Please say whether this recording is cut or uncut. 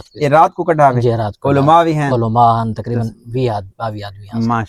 uncut